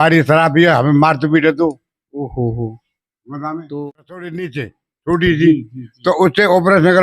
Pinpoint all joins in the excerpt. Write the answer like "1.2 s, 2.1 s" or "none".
4.3 s